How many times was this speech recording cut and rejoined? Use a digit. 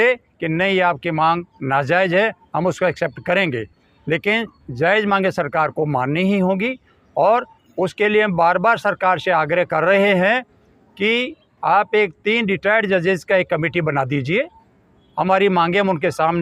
0